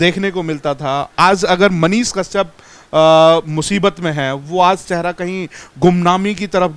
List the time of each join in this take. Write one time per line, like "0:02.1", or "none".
none